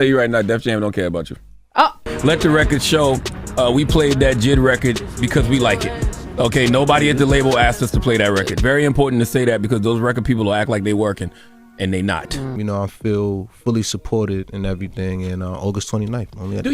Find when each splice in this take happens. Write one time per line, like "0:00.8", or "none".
0:02.1
0:12.5